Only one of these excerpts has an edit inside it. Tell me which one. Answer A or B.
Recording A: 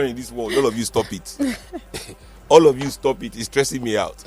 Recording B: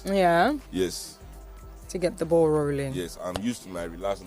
B